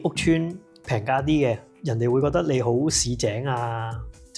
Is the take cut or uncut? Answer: cut